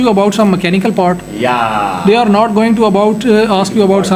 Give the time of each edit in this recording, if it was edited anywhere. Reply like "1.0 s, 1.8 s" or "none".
none